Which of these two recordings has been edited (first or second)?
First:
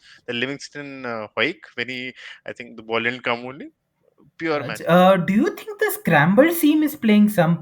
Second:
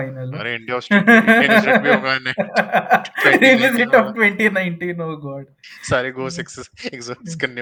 first